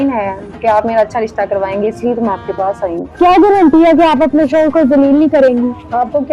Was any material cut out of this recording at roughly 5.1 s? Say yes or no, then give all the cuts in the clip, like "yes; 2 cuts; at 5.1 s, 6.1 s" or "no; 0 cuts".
no; 1 cut; at 3.0 s